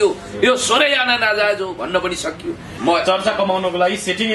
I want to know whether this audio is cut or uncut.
cut